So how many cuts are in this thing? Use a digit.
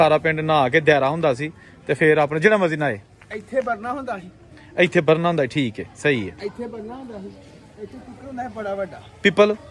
0